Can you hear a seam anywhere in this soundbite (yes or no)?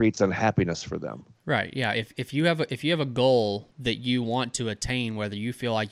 yes